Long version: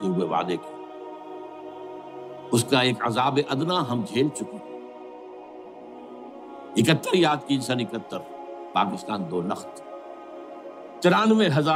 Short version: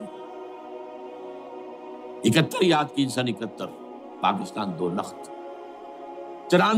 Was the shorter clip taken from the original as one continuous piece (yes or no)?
yes